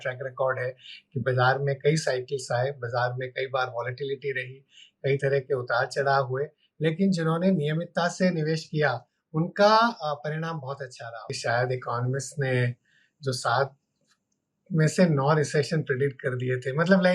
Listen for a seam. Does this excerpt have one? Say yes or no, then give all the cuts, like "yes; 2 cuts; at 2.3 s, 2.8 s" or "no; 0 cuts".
yes; 1 cut; at 11.3 s